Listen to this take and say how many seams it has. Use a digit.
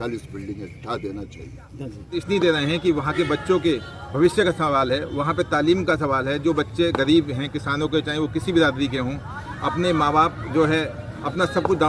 1